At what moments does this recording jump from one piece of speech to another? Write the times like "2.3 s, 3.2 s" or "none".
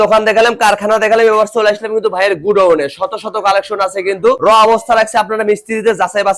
none